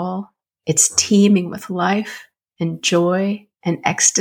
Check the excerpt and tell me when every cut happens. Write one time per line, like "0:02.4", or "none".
none